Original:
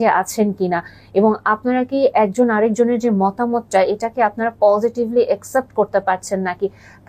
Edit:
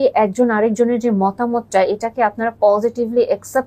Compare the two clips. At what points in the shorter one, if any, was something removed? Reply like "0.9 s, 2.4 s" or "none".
none